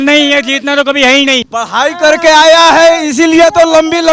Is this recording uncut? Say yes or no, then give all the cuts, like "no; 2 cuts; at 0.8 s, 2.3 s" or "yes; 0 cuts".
no; 1 cut; at 1.5 s